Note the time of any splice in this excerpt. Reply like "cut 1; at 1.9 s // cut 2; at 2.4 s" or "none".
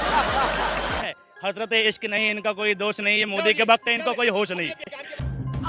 cut 1; at 1.0 s

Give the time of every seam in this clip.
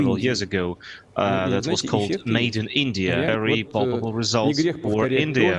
cut 1; at 3.3 s

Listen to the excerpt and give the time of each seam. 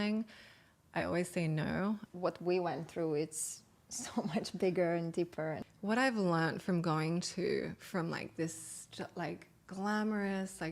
cut 1; at 2.0 s // cut 2; at 5.6 s

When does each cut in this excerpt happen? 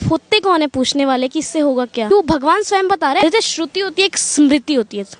cut 1; at 2.1 s // cut 2; at 3.2 s

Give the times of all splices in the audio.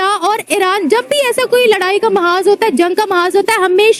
none

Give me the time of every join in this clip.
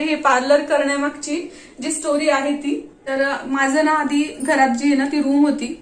none

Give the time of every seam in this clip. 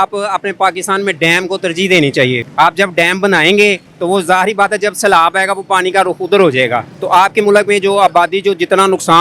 cut 1; at 2.4 s // cut 2; at 3.9 s // cut 3; at 6.9 s

